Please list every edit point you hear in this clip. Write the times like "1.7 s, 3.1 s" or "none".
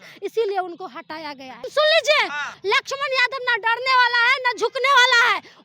1.6 s, 2.5 s